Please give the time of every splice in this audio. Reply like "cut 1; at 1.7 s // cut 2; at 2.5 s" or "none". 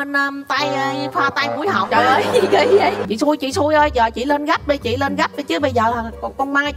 cut 1; at 3.0 s